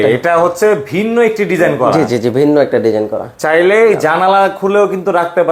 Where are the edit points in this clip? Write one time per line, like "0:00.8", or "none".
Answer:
none